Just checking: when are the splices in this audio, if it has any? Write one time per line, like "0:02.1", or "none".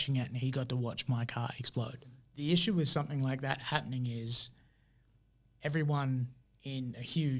0:02.2